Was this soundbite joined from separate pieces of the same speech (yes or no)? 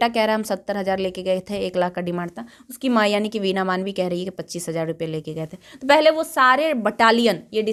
no